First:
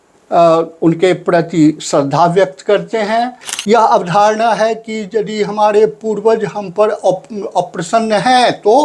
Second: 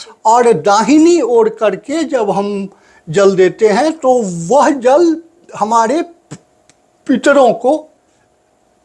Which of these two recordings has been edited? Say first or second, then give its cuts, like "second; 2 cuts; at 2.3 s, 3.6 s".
first; 1 cut; at 3.4 s